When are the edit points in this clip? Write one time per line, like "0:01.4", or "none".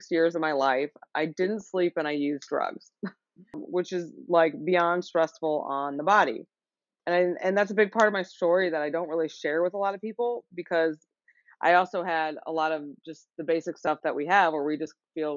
0:03.6
0:06.9